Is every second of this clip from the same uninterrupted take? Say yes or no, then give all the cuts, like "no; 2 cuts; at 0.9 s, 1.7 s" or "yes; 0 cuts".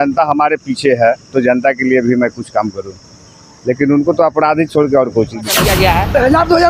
no; 1 cut; at 5.5 s